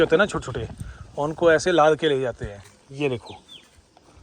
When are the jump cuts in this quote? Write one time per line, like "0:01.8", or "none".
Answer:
0:02.8

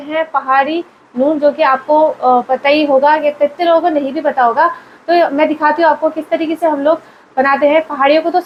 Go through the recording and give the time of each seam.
none

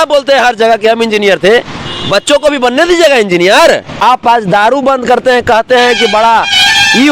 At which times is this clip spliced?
0:03.9

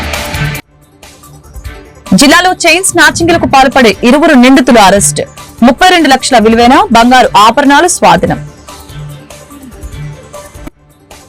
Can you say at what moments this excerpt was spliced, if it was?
none

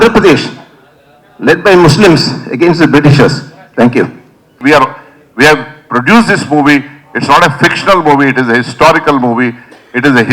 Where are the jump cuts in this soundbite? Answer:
0:04.5

